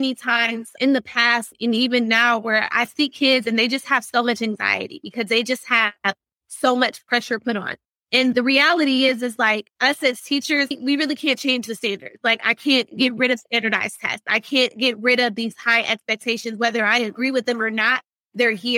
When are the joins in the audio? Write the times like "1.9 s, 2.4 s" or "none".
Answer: 1.5 s, 7.9 s